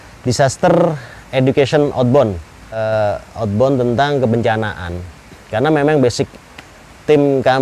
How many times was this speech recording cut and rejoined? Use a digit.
1